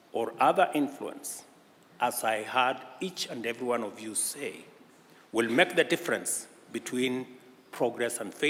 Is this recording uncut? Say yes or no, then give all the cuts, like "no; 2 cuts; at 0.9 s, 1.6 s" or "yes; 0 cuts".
yes; 0 cuts